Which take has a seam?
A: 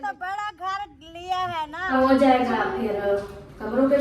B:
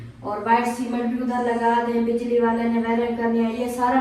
A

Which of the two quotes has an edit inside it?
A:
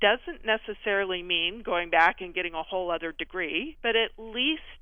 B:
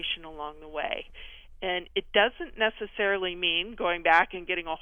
A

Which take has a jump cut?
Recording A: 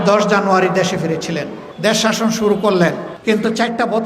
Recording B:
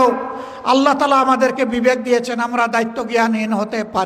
A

